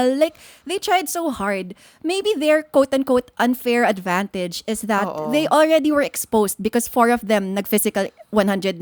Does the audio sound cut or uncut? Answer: uncut